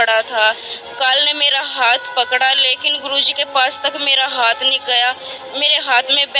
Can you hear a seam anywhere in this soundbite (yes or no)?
no